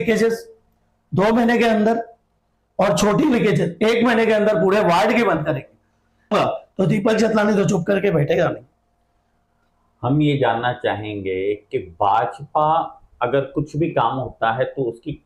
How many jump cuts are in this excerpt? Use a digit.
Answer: 1